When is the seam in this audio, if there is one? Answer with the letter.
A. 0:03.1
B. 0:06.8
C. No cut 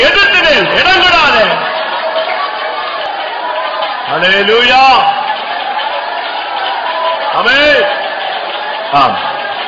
A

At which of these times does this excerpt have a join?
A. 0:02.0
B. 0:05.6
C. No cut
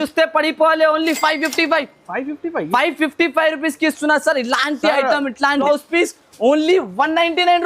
B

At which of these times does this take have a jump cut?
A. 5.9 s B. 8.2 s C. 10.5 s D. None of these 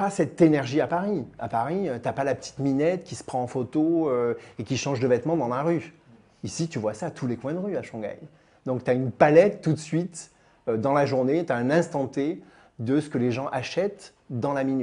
D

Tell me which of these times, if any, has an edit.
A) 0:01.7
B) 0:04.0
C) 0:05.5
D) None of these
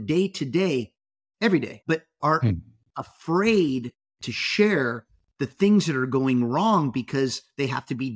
A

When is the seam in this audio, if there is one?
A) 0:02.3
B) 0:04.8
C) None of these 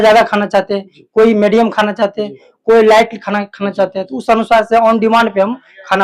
C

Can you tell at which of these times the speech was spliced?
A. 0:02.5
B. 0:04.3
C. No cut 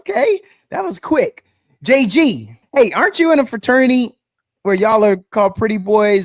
A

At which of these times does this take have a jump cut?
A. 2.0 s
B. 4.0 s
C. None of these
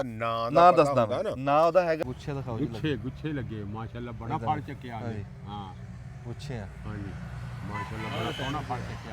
A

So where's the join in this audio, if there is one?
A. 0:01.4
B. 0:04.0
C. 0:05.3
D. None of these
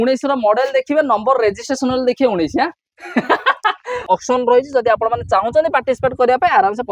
B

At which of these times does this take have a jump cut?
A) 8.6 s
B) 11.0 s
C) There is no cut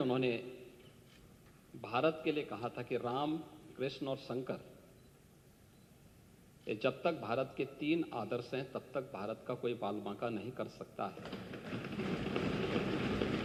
C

